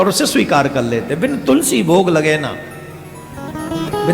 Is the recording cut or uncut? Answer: uncut